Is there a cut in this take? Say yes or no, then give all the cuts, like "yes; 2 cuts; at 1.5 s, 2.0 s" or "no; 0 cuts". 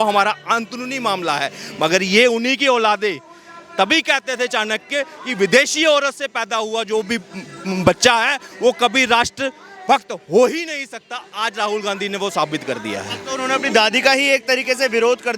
no; 0 cuts